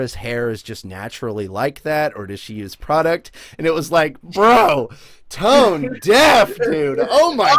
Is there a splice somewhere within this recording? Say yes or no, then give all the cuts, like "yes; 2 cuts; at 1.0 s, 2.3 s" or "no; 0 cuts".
no; 0 cuts